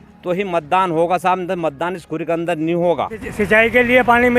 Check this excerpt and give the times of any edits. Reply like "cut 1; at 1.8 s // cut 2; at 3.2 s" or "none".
cut 1; at 3.2 s